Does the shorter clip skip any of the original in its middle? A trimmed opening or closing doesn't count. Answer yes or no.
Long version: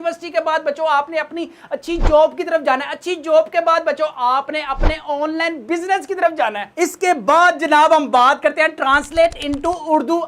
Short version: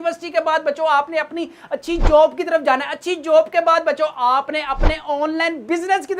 no